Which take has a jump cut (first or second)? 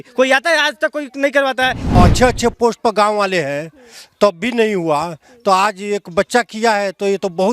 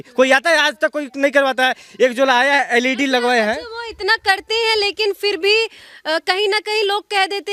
first